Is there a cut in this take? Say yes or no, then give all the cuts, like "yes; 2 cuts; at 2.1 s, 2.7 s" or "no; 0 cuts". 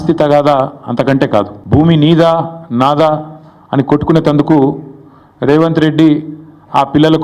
yes; 1 cut; at 1.6 s